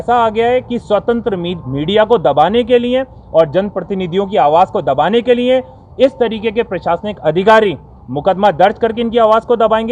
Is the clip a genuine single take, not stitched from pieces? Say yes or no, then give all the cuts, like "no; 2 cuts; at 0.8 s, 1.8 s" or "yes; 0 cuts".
yes; 0 cuts